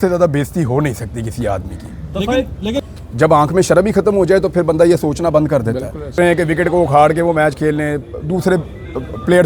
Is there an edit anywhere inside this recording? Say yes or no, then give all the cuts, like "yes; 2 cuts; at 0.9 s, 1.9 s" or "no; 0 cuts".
yes; 2 cuts; at 2.8 s, 6.2 s